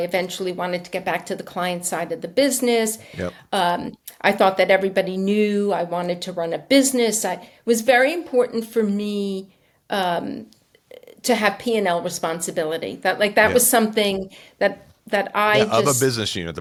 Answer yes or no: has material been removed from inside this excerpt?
no